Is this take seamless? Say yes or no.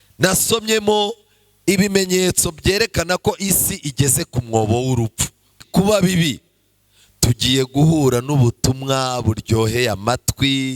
no